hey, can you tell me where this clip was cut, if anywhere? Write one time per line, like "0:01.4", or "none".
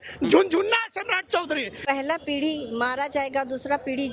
0:01.8